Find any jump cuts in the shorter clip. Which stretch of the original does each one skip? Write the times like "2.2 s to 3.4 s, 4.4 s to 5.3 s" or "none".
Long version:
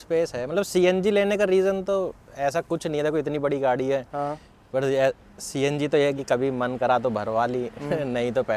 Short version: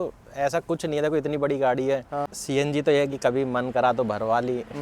4.3 s to 5.4 s